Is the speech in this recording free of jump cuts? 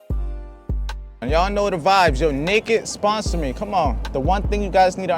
no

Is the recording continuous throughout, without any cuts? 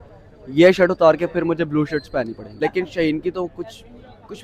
no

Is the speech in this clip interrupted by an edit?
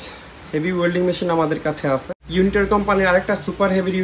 yes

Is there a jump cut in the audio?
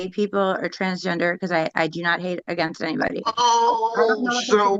no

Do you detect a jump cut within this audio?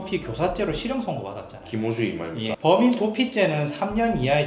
yes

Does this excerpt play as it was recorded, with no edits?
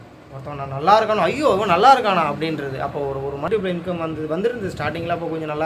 no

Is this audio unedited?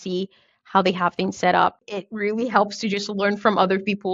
no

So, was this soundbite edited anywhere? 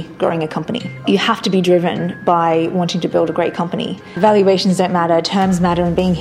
yes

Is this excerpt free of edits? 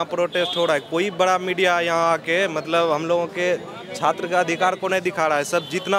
yes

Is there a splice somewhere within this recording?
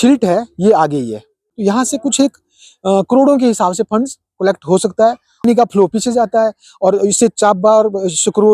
yes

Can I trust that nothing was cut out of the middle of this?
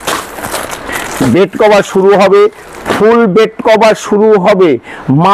yes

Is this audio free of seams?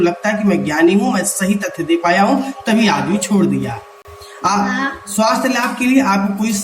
yes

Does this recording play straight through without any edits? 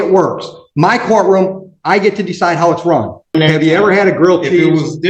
no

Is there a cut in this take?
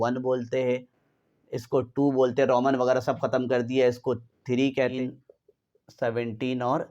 yes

